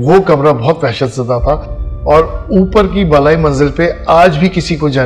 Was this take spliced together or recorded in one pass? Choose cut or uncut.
uncut